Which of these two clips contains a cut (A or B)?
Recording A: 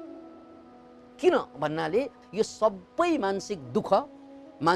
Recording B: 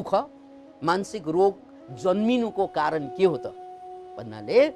A